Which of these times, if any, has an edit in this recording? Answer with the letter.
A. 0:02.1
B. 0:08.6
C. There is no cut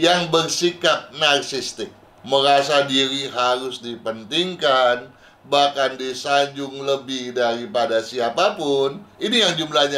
A